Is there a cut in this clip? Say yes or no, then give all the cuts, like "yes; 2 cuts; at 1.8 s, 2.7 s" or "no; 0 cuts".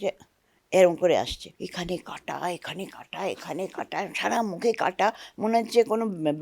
yes; 1 cut; at 1.4 s